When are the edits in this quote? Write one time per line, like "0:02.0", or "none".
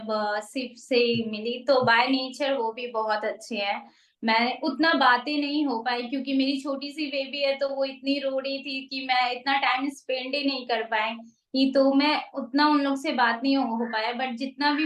none